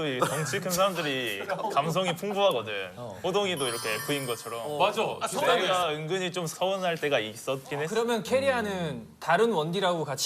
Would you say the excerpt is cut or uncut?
cut